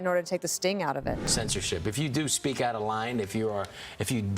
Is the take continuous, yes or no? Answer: no